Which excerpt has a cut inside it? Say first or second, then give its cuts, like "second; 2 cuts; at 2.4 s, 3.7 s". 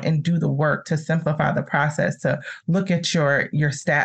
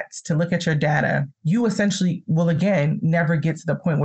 second; 1 cut; at 1.3 s